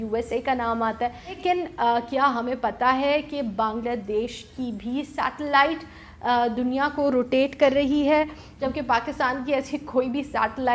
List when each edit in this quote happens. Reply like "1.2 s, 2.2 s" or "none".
1.4 s, 8.5 s